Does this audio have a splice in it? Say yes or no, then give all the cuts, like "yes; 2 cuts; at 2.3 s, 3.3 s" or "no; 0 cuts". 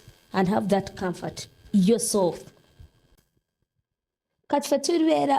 no; 0 cuts